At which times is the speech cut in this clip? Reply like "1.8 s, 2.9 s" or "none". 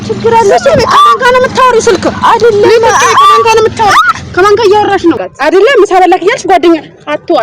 2.0 s, 5.3 s